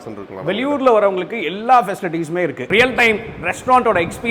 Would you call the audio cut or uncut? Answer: cut